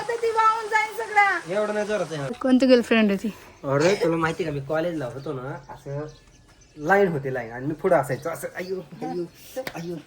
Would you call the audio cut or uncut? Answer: cut